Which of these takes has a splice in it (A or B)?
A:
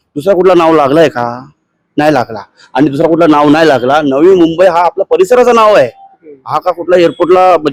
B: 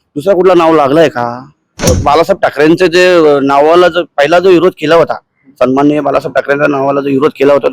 B